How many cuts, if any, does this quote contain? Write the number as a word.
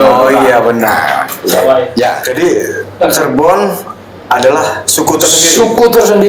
one